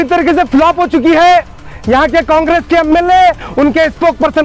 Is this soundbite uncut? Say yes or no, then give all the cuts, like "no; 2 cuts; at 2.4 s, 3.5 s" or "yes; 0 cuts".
yes; 0 cuts